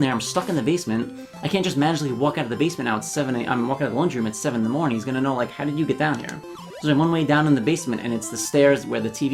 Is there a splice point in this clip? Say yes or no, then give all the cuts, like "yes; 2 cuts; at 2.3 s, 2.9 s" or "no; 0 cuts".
no; 0 cuts